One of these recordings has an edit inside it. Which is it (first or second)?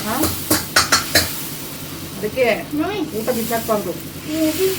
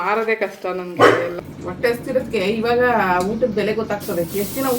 second